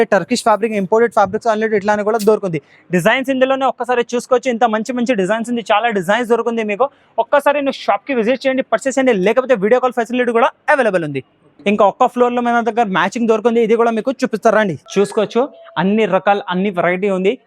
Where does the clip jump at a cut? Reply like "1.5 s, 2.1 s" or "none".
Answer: none